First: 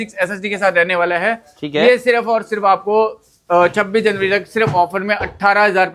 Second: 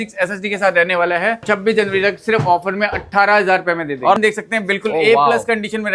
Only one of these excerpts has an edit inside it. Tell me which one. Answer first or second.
second